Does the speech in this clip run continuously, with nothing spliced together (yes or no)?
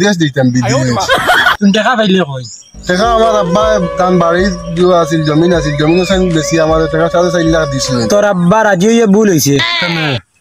no